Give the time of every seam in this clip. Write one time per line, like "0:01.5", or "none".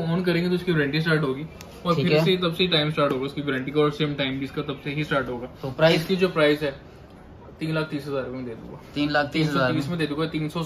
none